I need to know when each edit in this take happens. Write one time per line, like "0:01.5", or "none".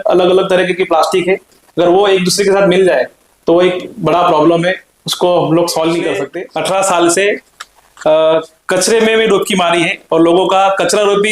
0:06.4